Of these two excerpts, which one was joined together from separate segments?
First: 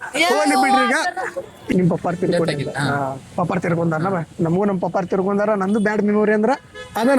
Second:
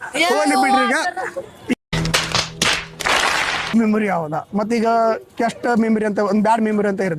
first; 1 cut; at 1.7 s

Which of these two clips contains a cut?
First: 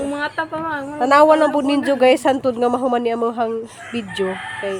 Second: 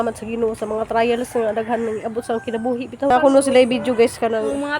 second; 1 cut; at 3.1 s

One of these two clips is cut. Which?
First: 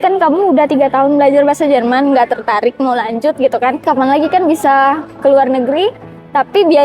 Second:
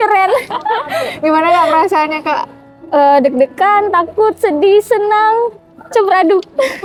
first; 1 cut; at 3.8 s

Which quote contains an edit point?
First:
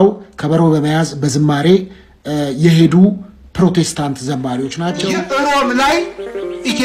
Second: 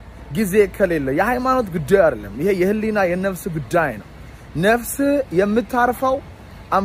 first; 1 cut; at 5.0 s

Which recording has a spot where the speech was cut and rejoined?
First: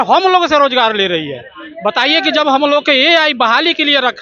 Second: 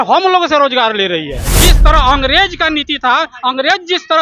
second; 1 cut; at 1.5 s

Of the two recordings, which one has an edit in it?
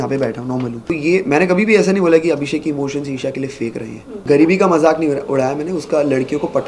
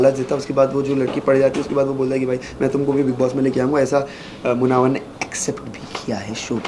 first; 2 cuts; at 0.9 s, 4.2 s

